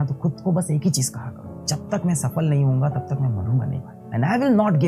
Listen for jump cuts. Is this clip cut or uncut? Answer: cut